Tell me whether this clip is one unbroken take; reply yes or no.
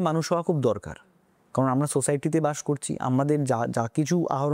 yes